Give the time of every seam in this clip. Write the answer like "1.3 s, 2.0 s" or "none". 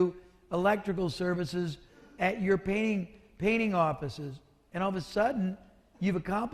none